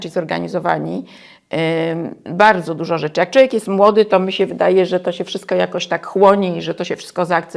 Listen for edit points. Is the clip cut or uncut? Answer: uncut